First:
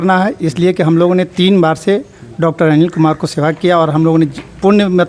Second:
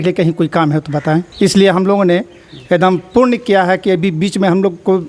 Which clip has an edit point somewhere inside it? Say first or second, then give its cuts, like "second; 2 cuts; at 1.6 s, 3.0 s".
second; 1 cut; at 1.3 s